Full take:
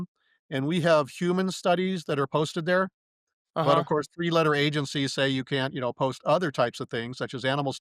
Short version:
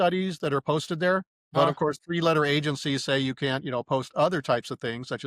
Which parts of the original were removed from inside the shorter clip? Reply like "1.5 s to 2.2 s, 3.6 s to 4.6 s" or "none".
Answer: 3.2 s to 3.6 s